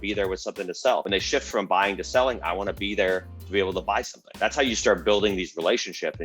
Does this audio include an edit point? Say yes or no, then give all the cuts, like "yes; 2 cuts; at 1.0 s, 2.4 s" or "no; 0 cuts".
yes; 2 cuts; at 1.0 s, 4.2 s